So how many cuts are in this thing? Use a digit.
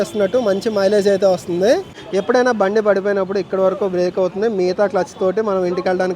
1